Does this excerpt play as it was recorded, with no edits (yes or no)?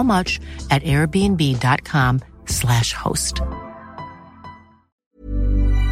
no